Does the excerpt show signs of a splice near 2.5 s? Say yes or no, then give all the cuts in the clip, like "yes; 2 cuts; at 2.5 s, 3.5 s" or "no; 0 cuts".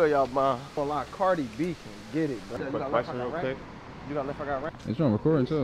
yes; 2 cuts; at 2.5 s, 4.7 s